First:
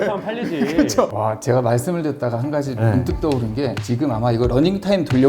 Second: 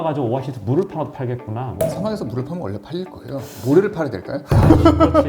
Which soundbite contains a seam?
first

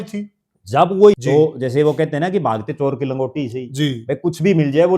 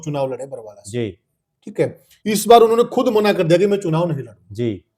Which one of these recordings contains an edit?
first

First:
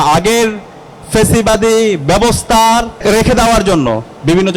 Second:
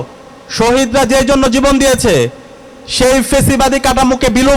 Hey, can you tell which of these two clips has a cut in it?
first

